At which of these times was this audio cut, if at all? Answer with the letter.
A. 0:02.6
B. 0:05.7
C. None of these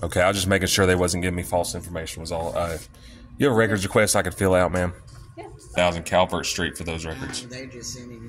B